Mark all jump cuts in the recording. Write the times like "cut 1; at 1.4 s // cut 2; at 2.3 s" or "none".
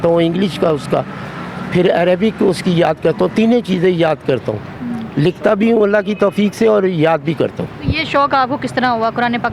none